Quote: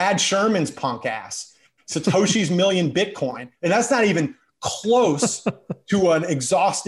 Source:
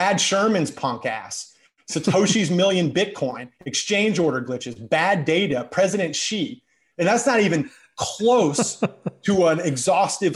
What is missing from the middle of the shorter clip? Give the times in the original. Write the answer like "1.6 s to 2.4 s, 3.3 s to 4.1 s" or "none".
3.5 s to 6.8 s